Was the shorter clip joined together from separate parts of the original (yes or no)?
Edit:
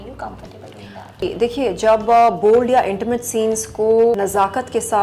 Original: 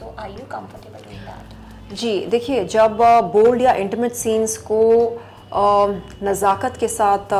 yes